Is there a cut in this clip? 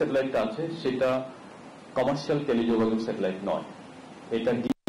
no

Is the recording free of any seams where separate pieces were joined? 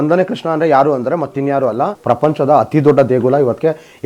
no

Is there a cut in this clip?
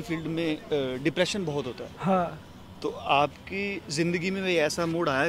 no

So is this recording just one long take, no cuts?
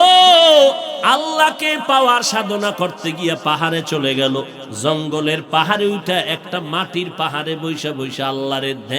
no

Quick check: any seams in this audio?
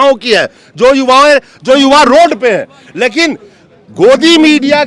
no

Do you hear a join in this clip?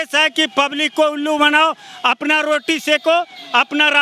no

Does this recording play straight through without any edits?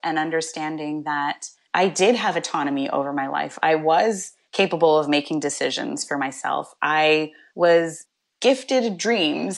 no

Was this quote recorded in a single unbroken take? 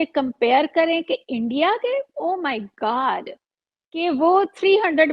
yes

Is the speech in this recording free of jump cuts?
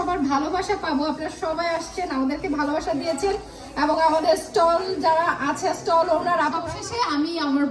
no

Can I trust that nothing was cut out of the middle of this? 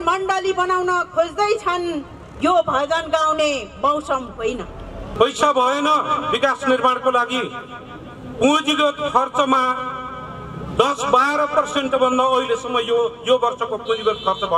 no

